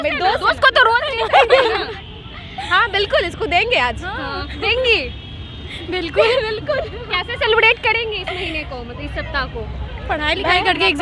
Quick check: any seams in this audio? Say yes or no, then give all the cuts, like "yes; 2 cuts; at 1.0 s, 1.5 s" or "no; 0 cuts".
no; 0 cuts